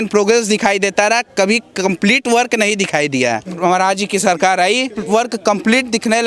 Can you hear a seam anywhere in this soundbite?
yes; 2 cuts; at 3.5 s, 5.0 s

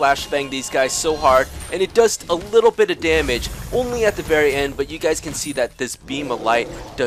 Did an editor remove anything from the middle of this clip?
no; 0 cuts

